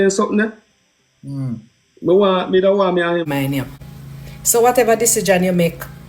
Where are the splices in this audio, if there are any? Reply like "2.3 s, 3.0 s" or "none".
3.2 s